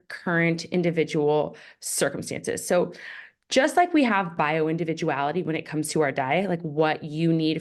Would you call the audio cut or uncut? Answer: uncut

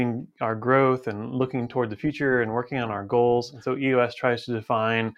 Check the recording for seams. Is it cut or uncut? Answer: cut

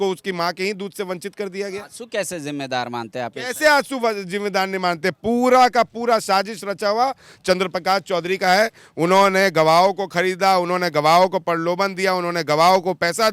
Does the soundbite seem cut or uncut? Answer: uncut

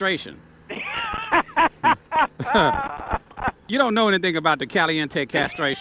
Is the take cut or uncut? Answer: cut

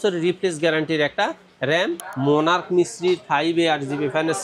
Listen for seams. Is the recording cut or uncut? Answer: cut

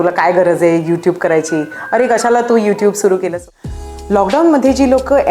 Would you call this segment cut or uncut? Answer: cut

